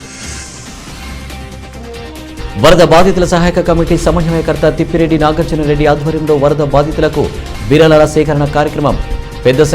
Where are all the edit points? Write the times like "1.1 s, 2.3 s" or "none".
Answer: 0.9 s